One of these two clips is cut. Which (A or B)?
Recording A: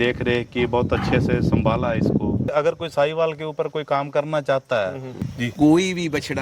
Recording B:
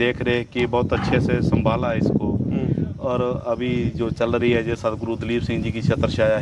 A